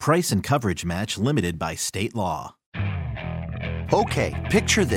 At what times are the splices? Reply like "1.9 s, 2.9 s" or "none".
2.6 s